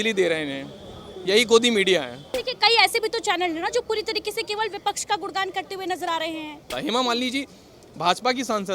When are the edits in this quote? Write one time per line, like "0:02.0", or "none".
0:02.4
0:06.7